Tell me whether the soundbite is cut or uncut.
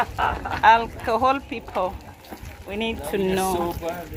uncut